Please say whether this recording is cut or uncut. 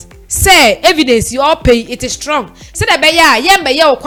uncut